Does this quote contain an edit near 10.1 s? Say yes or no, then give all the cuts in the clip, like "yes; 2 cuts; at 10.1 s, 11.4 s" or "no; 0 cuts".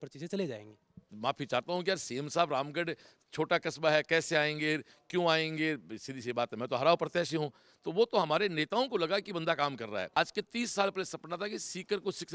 yes; 2 cuts; at 1.1 s, 10.1 s